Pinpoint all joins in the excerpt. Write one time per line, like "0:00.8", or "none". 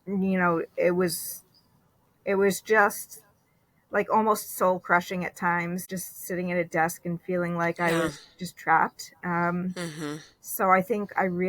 0:06.0